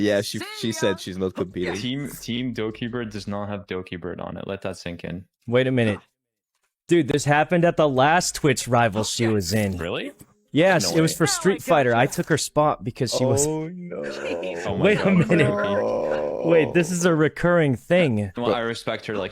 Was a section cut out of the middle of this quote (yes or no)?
yes